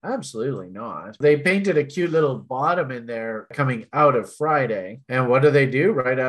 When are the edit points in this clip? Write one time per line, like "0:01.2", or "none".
0:01.2
0:03.5